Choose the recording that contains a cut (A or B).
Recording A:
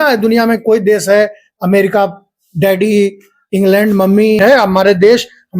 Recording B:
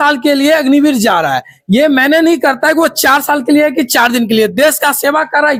A